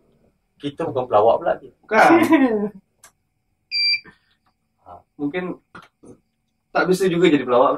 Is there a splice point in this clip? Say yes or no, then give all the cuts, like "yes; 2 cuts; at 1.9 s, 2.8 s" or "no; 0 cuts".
no; 0 cuts